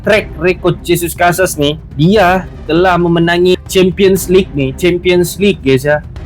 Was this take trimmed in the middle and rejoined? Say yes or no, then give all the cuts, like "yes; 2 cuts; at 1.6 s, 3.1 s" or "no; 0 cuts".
yes; 1 cut; at 3.5 s